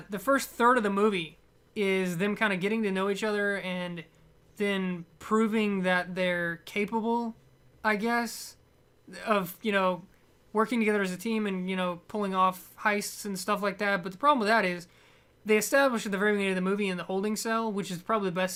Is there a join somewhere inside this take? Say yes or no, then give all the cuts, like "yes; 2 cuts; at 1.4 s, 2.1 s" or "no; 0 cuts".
no; 0 cuts